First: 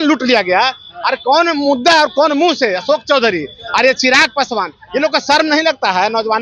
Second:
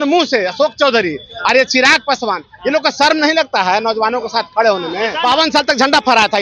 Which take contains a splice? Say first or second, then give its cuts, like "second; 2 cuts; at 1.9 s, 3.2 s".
second; 1 cut; at 5.1 s